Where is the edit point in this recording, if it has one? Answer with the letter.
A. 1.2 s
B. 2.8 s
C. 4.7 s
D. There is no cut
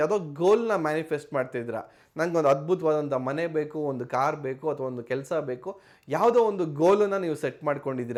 D